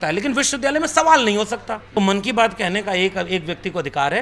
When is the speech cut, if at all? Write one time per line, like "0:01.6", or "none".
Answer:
0:01.9